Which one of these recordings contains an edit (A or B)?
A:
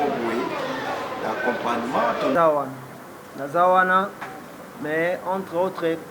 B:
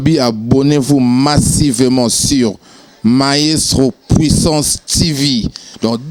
A